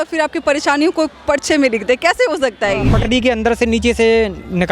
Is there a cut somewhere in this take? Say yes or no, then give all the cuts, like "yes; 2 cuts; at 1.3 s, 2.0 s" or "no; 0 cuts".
yes; 1 cut; at 2.9 s